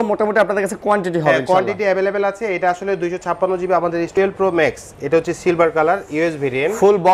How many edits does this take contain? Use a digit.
1